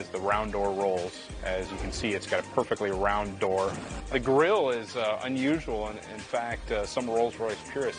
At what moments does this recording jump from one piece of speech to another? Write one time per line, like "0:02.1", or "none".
0:03.9